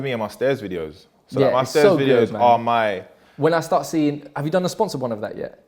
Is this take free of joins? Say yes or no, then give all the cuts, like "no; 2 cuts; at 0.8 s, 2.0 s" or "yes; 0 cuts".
yes; 0 cuts